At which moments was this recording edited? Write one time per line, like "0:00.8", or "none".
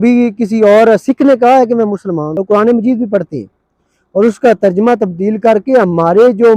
0:02.3

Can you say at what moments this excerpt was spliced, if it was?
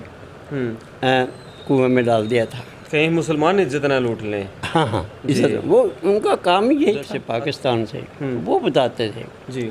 0:07.2

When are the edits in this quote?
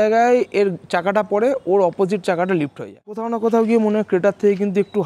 0:03.3

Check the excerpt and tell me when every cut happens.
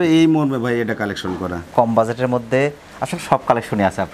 0:01.6

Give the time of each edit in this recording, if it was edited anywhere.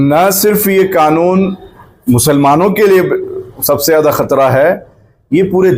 none

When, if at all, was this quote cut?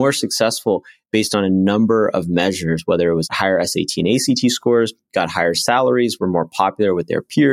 0:03.3

